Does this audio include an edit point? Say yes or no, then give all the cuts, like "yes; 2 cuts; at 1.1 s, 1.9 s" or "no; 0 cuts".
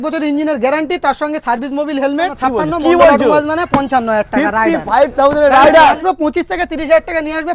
yes; 2 cuts; at 2.3 s, 6.0 s